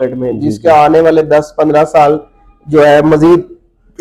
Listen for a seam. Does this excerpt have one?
no; 0 cuts

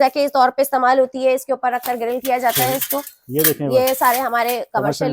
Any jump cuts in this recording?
no; 0 cuts

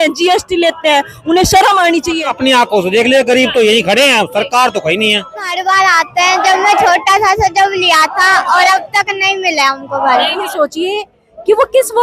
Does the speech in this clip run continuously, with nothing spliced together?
no; 3 cuts; at 2.3 s, 5.5 s, 10.4 s

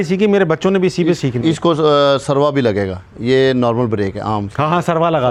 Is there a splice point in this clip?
no; 0 cuts

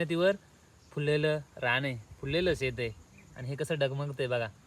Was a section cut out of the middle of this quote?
no; 0 cuts

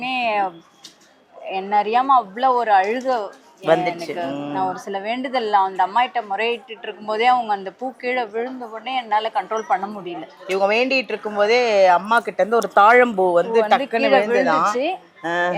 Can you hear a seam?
no; 0 cuts

